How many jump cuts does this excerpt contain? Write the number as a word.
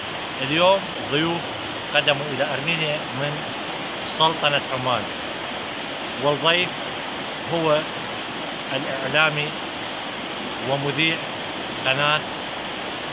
one